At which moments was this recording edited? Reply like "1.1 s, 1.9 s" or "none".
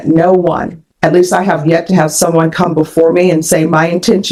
none

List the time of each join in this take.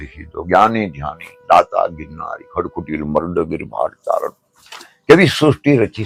none

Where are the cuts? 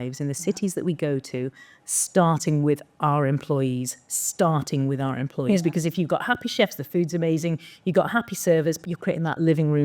8.8 s

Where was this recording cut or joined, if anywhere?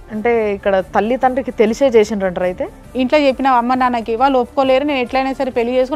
2.8 s

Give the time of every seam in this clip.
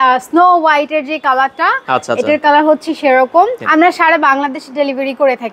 3.6 s

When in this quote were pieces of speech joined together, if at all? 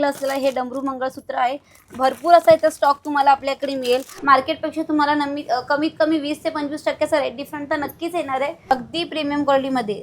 4.1 s, 8.7 s

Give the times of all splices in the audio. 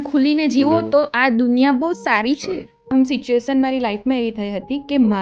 2.8 s

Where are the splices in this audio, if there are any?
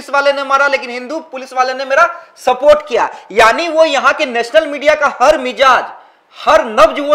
none

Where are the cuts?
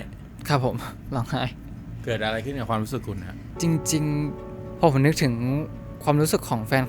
4.4 s

